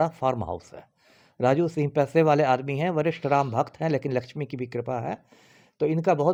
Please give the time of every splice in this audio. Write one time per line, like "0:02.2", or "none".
none